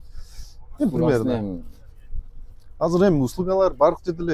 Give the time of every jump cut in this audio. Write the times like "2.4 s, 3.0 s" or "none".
none